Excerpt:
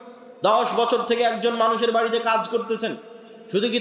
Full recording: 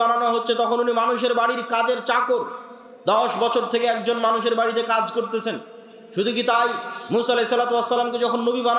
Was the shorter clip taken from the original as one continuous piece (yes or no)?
yes